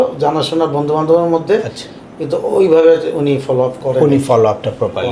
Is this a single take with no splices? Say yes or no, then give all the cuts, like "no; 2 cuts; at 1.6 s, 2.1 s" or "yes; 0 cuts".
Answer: yes; 0 cuts